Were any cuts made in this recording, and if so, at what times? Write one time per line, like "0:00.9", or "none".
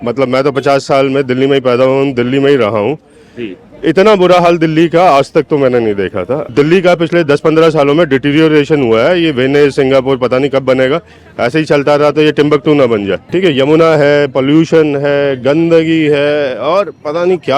0:06.5
0:13.2